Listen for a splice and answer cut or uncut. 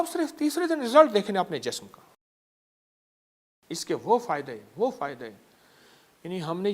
uncut